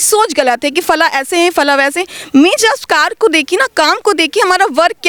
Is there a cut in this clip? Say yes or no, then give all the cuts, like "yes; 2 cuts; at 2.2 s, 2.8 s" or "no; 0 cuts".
no; 0 cuts